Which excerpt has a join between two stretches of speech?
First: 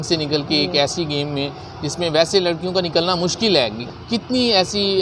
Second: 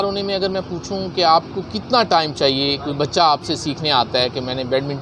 first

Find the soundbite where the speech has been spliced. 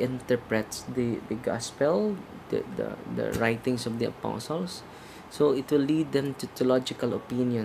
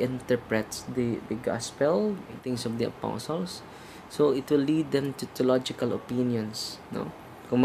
second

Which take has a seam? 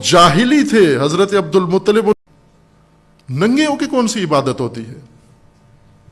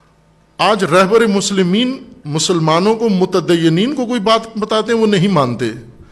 first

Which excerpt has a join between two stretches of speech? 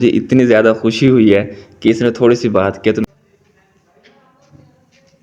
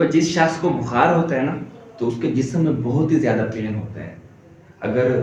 first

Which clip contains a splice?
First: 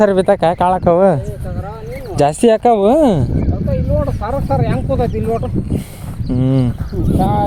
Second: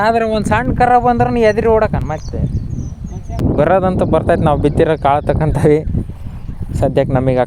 second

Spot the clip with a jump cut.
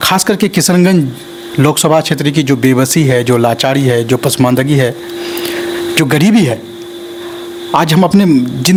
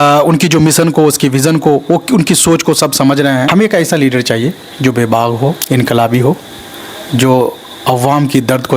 second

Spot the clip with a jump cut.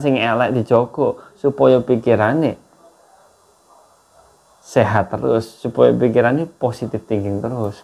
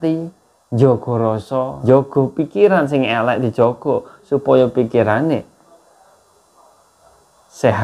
second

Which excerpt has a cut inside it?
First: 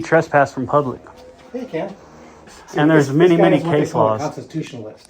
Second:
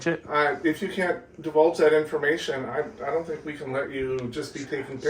first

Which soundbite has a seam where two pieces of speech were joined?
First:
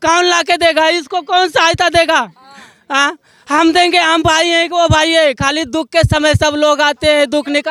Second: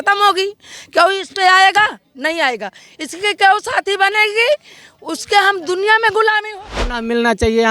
second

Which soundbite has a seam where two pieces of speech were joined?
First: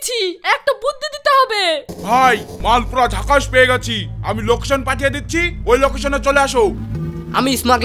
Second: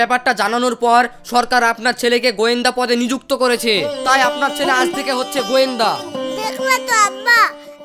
first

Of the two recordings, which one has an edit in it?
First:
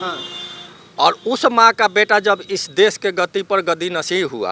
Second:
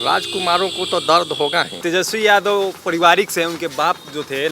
second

